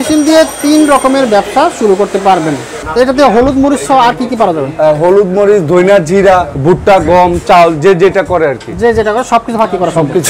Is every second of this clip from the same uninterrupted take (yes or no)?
no